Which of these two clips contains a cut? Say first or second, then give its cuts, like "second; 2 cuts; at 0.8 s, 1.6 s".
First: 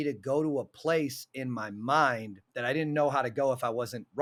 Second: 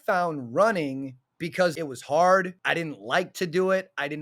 second; 2 cuts; at 1.7 s, 2.6 s